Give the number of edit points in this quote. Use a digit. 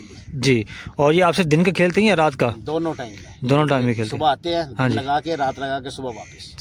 0